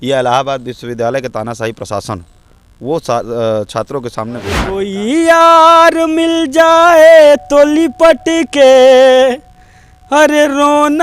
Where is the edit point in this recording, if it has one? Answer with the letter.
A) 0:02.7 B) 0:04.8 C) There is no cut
B